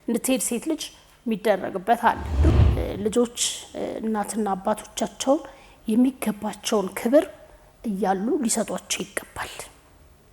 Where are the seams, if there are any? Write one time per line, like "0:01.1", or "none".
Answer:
0:02.5